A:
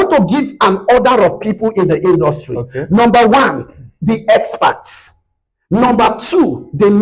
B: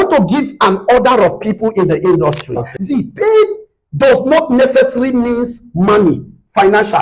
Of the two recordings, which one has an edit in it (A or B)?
B